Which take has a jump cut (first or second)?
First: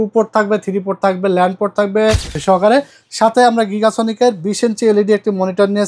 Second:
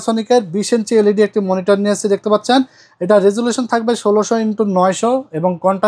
first